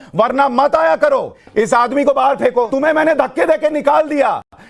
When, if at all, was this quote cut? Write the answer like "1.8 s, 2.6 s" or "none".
1.4 s, 2.7 s